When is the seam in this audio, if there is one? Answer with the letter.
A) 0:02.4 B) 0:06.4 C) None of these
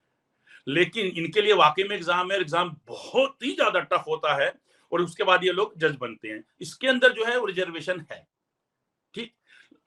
C